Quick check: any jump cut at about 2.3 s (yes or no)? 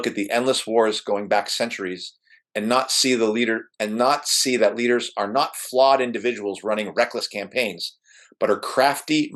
no